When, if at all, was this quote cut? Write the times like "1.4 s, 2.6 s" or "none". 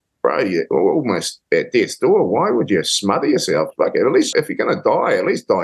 4.3 s